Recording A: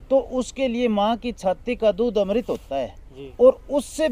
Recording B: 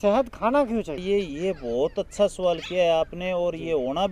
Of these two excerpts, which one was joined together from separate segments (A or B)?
B